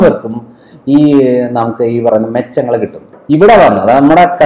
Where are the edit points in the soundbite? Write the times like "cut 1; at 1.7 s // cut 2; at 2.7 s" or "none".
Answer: cut 1; at 3.1 s